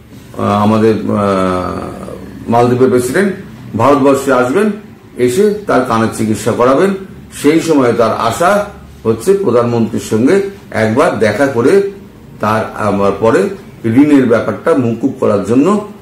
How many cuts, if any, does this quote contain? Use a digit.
0